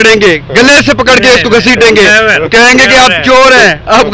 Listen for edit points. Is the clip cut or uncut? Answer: uncut